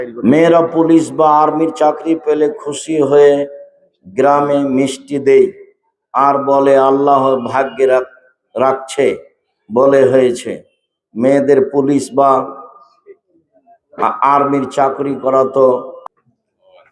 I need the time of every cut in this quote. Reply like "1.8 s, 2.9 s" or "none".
16.0 s

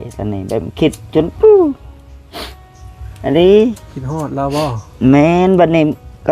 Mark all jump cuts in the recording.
none

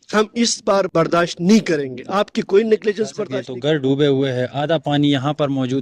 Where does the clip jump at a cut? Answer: 3.2 s

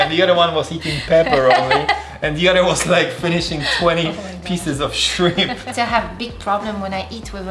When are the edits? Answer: 5.7 s

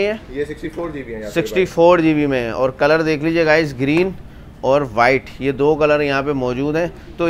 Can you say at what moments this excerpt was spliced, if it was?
none

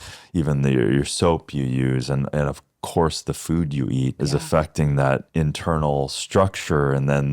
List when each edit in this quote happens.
4.2 s, 5.3 s

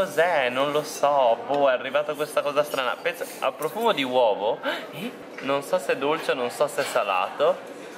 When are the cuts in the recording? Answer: none

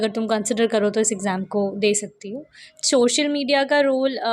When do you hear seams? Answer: 2.6 s

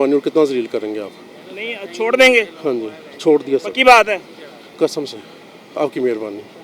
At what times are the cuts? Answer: none

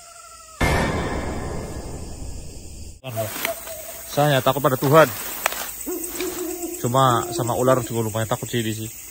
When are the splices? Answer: 3.1 s

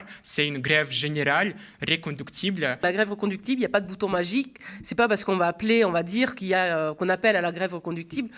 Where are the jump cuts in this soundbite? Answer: 2.8 s

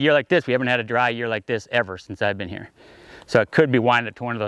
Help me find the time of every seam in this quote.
none

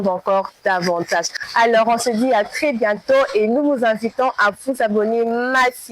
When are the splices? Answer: 1.4 s

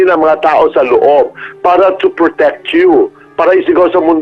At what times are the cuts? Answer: none

